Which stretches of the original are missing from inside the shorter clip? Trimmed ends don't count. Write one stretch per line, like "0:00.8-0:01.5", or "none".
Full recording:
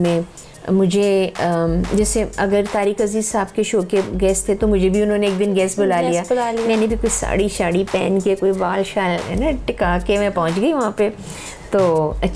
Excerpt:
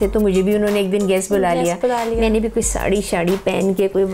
none

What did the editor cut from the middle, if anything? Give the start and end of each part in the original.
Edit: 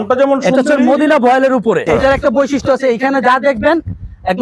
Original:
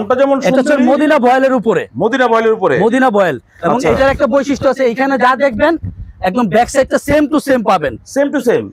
0:01.8-0:03.8

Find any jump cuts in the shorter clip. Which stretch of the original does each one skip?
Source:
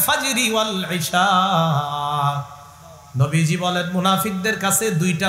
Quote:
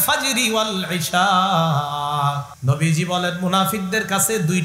0:02.5-0:03.0

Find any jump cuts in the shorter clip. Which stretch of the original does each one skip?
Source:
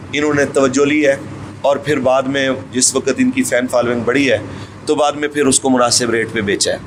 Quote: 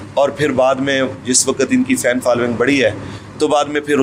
none

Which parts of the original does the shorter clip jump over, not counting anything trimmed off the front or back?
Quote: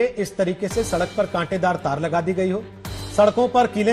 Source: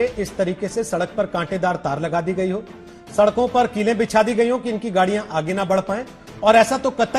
none

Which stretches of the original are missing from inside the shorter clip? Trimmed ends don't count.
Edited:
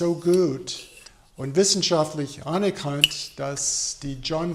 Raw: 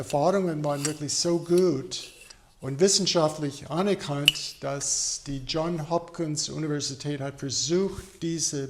none

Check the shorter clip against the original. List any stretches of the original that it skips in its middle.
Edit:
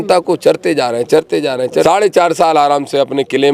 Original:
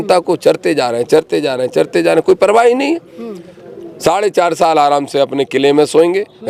0:01.8-0:04.0

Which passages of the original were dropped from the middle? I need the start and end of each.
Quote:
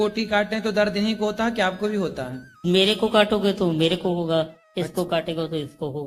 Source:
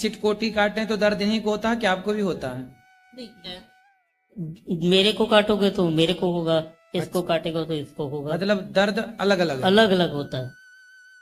0:02.9-0:04.8

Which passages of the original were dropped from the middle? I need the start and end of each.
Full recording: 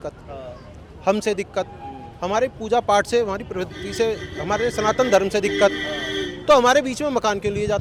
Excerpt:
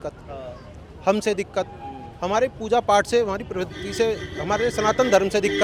none

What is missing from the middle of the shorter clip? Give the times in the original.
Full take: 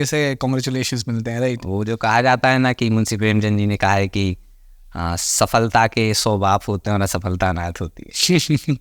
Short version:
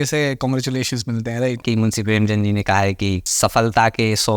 0:01.6-0:02.8
0:04.4-0:05.3

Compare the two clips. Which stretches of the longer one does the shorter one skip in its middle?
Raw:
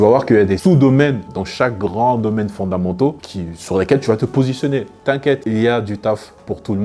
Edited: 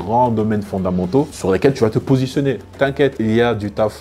0:03.2-0:03.6

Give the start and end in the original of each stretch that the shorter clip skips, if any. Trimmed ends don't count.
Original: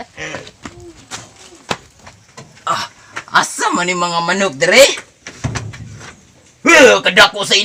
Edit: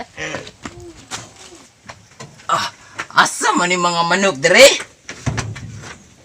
0:01.6-0:01.8

